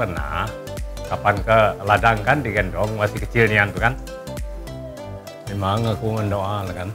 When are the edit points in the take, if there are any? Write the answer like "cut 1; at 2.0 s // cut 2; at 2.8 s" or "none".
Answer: none

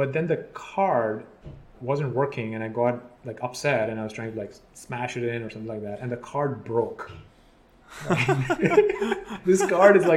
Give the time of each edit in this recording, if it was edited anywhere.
cut 1; at 1.7 s // cut 2; at 9.3 s

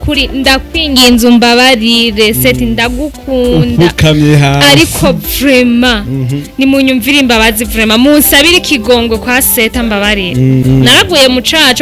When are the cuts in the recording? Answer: cut 1; at 10.6 s

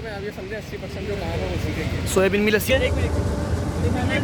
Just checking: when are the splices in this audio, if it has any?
cut 1; at 2.7 s

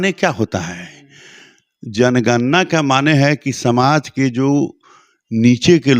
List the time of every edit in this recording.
none

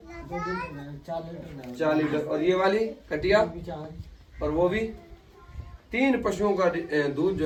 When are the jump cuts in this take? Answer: none

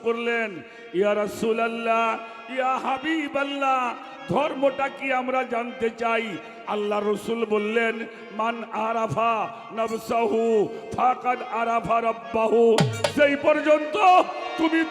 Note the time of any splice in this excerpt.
none

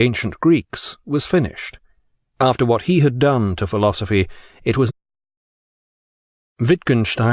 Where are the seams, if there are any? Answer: none

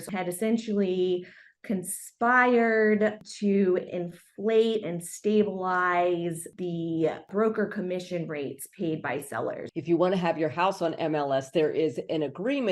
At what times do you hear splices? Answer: cut 1; at 9.7 s

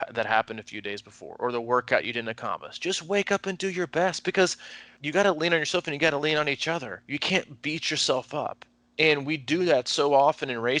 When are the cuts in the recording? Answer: cut 1; at 4.9 s

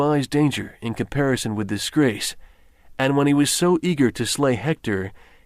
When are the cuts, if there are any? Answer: cut 1; at 3.3 s

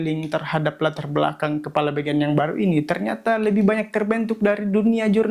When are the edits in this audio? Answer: none

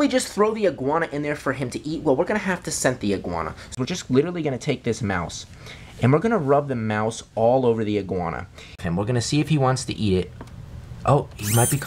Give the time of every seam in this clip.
cut 1; at 3.7 s // cut 2; at 8.8 s

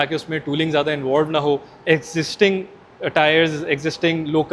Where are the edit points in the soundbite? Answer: none

